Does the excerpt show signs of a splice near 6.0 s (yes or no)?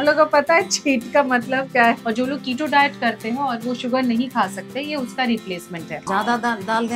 yes